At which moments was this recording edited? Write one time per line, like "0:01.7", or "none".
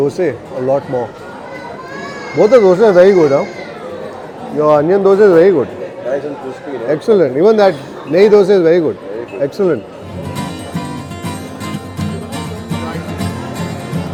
none